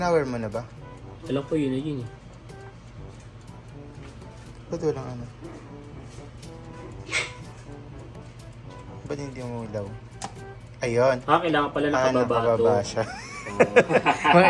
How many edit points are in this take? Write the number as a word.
zero